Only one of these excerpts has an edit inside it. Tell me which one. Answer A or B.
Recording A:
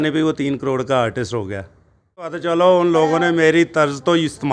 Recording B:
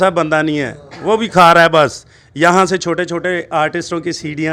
A